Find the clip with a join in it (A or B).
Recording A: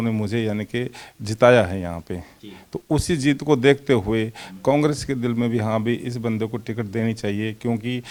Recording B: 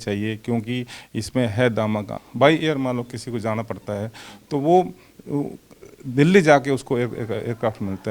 B